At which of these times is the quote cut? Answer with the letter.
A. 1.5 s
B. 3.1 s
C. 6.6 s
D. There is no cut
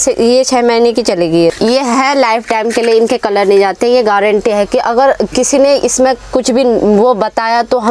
A